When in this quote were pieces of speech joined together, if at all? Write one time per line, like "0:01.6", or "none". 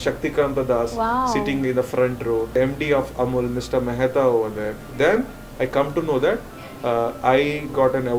0:02.5
0:04.8